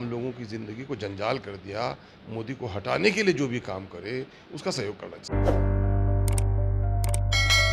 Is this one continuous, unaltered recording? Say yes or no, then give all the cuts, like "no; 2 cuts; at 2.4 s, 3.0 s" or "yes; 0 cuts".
yes; 0 cuts